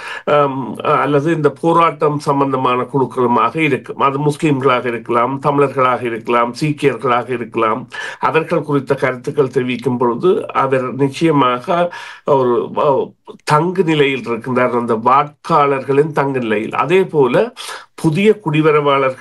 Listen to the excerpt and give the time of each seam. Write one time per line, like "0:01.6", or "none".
none